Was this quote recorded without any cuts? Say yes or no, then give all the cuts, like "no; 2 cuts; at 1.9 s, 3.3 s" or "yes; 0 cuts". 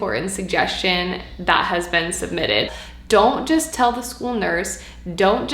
no; 1 cut; at 2.8 s